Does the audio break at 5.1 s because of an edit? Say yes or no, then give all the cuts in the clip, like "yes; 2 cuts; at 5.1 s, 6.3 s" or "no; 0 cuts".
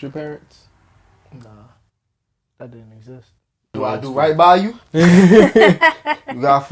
no; 1 cut; at 3.7 s